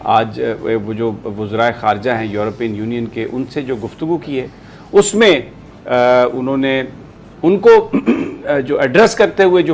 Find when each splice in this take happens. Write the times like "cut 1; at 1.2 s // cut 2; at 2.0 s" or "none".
none